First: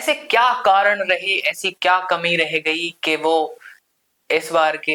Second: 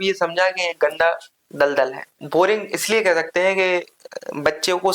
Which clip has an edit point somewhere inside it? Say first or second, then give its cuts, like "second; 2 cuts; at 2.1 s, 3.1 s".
second; 1 cut; at 2.1 s